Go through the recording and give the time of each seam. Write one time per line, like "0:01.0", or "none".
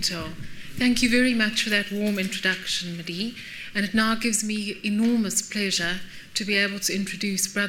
0:02.5